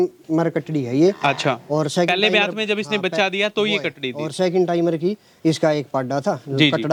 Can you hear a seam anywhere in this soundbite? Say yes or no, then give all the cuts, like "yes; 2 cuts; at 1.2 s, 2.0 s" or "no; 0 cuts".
no; 0 cuts